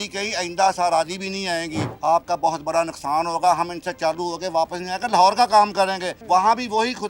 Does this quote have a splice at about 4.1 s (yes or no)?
no